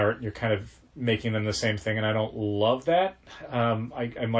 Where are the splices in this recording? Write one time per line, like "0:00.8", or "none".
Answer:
none